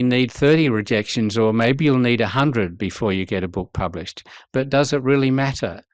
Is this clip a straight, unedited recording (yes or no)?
yes